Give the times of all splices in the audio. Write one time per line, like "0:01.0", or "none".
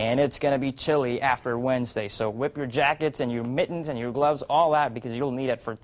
none